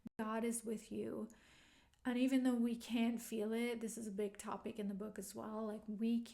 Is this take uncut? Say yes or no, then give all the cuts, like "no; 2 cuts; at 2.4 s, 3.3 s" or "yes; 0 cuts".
yes; 0 cuts